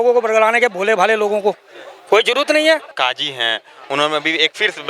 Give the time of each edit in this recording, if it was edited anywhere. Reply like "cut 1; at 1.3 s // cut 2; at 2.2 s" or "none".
cut 1; at 2.9 s